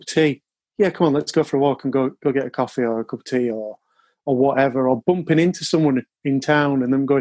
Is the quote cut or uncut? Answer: uncut